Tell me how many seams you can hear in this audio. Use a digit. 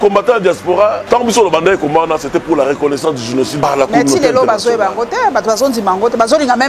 2